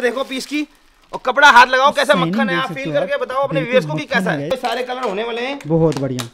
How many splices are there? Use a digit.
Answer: 1